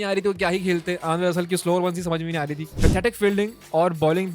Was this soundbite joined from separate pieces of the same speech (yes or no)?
yes